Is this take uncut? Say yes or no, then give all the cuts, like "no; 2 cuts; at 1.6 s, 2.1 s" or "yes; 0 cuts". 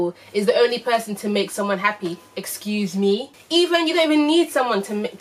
yes; 0 cuts